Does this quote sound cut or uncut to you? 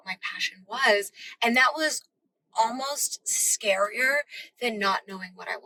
uncut